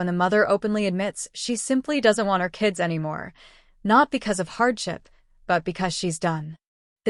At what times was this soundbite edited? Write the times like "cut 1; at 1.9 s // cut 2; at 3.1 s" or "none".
none